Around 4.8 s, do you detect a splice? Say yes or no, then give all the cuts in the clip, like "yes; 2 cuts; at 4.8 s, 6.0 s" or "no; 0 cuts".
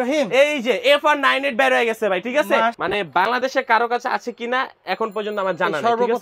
no; 1 cut; at 2.8 s